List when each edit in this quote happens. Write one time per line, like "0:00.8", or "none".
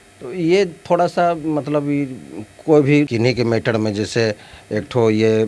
0:03.1

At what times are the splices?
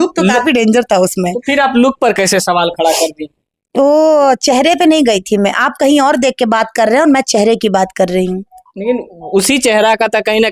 none

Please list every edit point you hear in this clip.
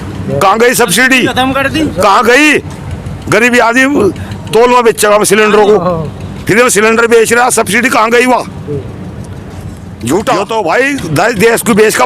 0:10.4

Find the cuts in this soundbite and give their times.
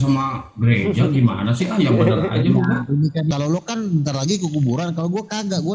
0:03.3

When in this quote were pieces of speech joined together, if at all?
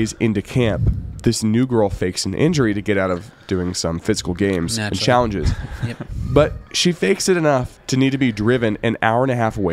none

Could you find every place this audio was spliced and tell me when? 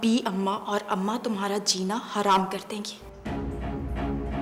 0:03.0

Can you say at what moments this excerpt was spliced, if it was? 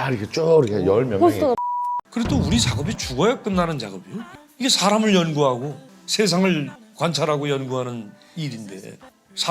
0:01.7

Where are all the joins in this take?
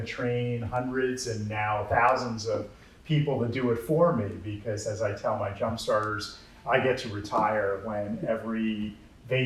none

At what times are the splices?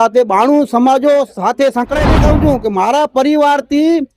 0:02.1

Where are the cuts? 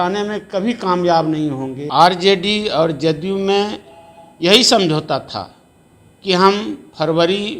0:01.8

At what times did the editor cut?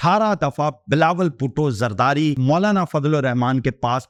none

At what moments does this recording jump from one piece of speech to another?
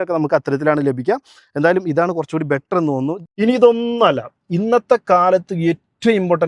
0:03.2

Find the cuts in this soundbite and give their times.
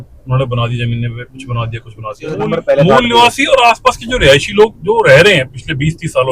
0:02.4

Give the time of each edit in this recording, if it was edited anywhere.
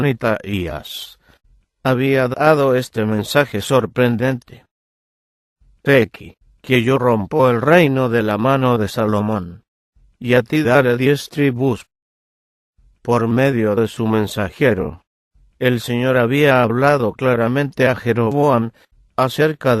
0:09.2

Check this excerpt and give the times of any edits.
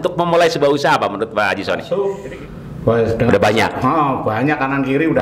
0:01.8

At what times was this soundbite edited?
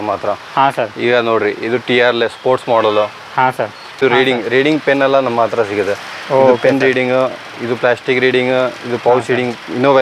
0:04.0

